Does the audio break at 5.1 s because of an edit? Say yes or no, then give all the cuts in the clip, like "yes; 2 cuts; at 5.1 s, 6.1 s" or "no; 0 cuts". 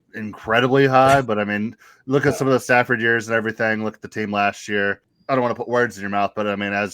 yes; 1 cut; at 5.1 s